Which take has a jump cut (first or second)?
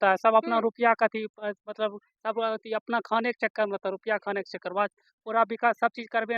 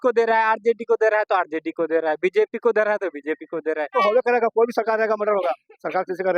second